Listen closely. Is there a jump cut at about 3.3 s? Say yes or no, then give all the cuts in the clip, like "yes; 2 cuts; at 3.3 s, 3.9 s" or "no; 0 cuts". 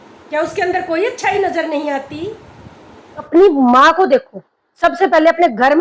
yes; 1 cut; at 3.3 s